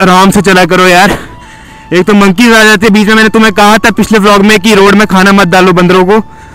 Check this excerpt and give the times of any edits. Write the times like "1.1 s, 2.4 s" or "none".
none

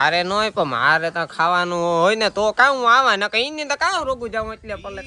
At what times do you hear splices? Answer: none

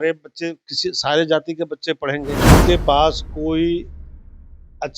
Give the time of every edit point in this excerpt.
2.5 s

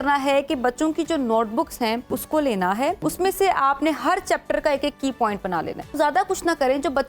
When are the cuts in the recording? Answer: 2.1 s, 3.0 s, 5.9 s

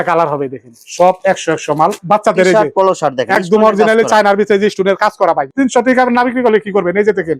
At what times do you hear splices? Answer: 2.0 s, 5.5 s

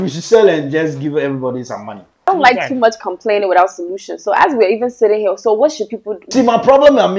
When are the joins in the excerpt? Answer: 2.3 s, 6.2 s

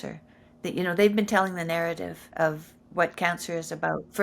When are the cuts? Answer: 2.2 s

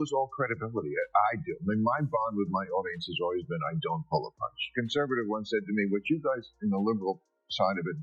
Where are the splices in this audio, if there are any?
4.8 s

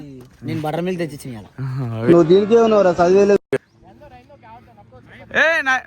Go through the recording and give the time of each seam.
3.6 s

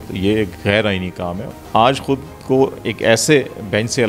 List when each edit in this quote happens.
1.5 s

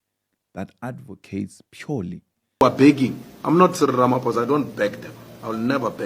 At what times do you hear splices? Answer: 2.6 s

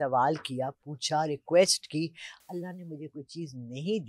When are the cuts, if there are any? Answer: none

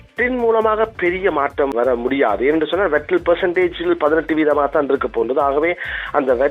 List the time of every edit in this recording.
1.7 s

